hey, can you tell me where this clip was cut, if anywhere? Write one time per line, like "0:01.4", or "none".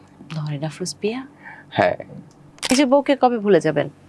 0:02.6